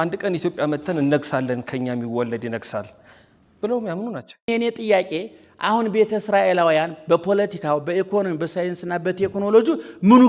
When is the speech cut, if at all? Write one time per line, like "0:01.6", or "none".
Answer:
0:04.5